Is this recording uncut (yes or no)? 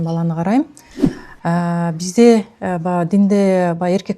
yes